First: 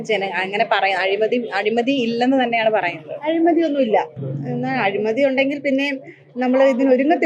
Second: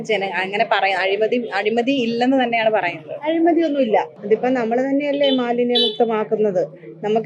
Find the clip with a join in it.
second; 1 cut; at 4.2 s

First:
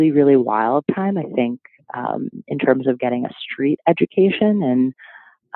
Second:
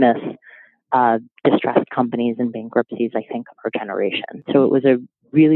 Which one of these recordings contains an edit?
second; 1 cut; at 4.4 s

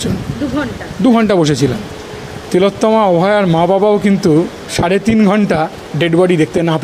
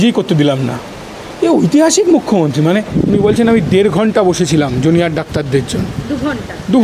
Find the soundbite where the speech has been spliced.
second; 1 cut; at 2.9 s

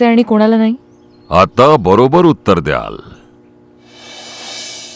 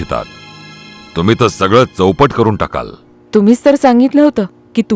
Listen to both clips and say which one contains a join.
first; 1 cut; at 4.0 s

